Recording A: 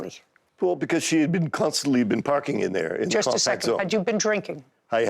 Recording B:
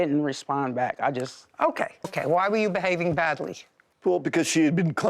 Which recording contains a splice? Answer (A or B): B